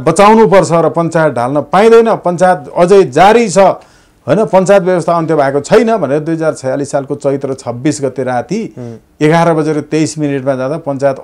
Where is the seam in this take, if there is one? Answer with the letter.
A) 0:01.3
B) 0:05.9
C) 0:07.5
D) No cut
D